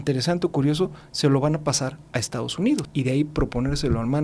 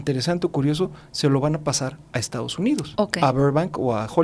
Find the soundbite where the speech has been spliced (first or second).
first